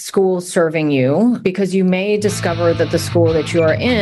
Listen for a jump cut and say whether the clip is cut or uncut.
uncut